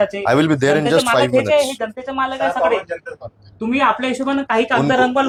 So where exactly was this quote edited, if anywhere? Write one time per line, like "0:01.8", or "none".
none